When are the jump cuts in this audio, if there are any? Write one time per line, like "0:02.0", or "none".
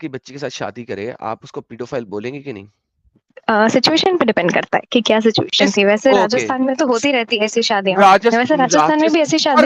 0:03.3